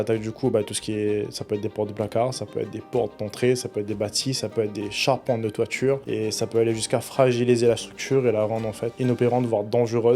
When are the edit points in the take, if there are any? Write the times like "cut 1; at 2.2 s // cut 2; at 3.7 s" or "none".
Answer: cut 1; at 6.0 s // cut 2; at 8.9 s